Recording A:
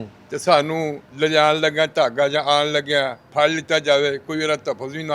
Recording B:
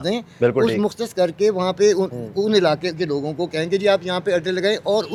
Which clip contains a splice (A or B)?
A